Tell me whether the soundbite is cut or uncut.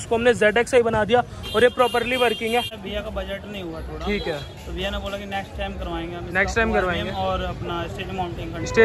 cut